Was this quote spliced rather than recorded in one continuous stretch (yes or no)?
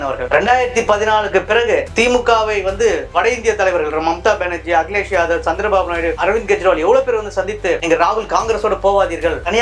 yes